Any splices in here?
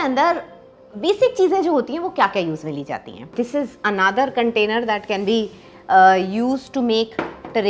yes; 1 cut; at 3.4 s

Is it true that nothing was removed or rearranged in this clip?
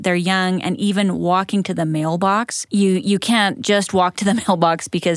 no; 1 cut; at 2.6 s

